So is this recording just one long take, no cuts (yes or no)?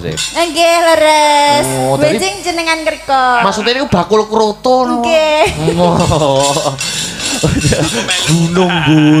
yes